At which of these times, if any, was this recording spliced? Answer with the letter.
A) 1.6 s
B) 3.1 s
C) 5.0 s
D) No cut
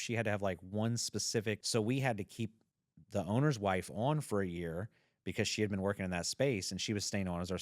A